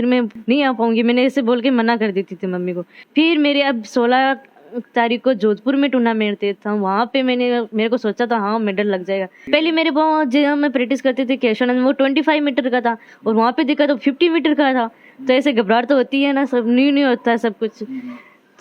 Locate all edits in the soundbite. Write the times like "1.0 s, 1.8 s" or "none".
none